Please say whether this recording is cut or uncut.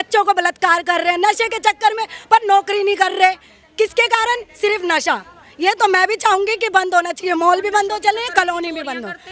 uncut